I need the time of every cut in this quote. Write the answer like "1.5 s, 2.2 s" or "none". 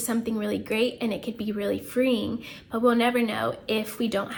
none

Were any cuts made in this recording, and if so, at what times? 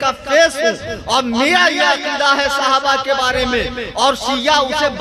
none

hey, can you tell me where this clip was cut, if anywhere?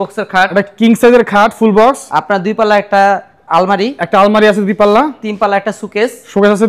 none

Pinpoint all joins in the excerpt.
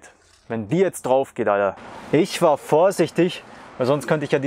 1.8 s

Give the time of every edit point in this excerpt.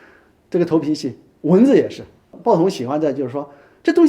2.3 s

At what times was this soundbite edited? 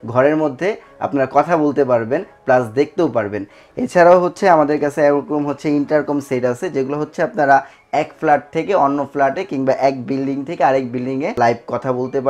11.4 s

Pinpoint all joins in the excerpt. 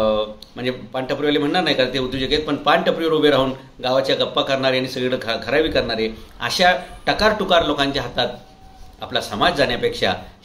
none

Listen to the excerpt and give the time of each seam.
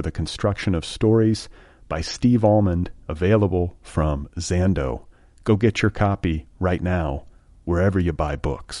none

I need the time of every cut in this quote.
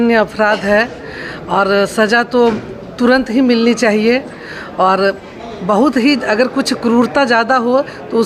none

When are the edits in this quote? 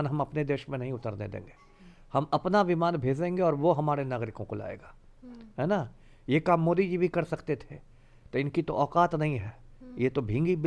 none

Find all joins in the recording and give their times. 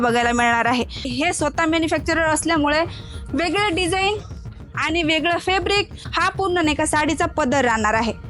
1.1 s, 6.0 s

